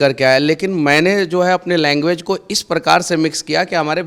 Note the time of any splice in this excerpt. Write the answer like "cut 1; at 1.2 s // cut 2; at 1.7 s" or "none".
none